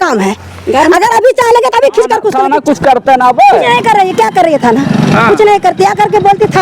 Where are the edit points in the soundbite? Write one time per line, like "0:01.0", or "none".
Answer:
0:02.3